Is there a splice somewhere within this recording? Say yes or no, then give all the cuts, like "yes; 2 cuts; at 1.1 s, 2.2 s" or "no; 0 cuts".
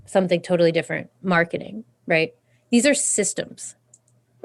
no; 0 cuts